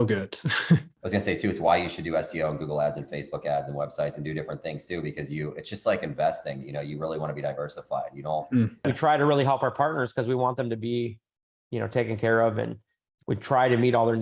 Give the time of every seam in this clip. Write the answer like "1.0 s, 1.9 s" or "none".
0.9 s, 8.8 s